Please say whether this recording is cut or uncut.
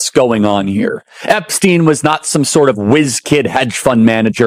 uncut